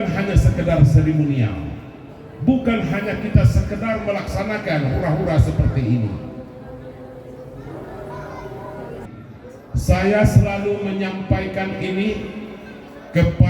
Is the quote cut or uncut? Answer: cut